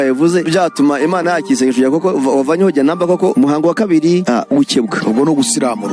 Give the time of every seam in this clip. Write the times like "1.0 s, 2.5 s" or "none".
none

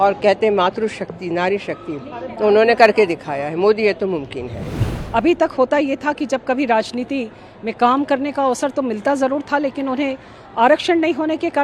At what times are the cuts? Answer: 4.8 s

